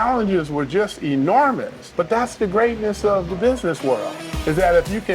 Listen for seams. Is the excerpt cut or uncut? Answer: cut